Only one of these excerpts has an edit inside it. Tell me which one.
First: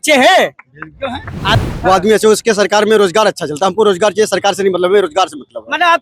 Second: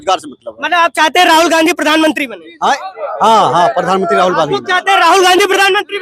first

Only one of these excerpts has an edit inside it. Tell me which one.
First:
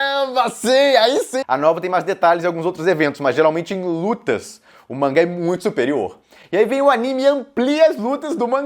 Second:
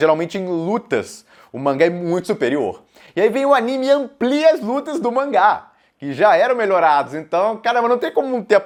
first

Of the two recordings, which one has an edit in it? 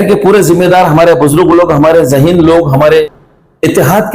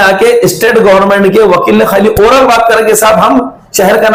first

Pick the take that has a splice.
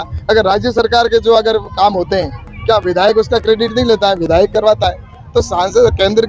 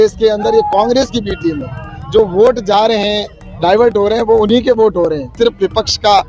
second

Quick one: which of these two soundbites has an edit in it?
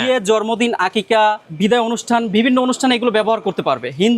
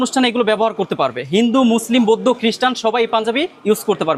first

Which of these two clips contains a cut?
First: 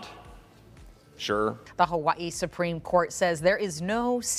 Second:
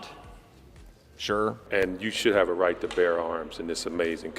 second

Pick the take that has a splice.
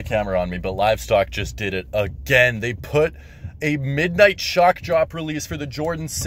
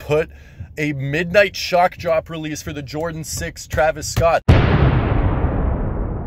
second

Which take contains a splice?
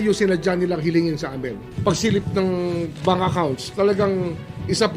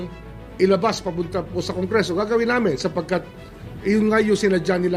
first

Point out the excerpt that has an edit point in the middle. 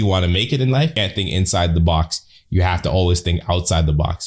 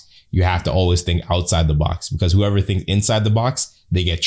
first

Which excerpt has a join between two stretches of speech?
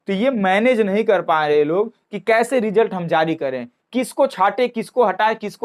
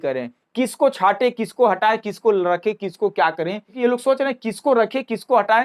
second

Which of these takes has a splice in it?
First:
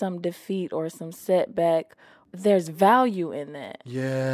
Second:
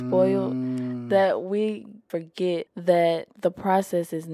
second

